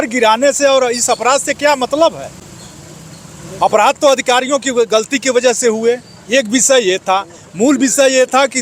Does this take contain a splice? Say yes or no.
no